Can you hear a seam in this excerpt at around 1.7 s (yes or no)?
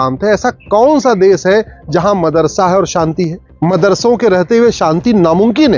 no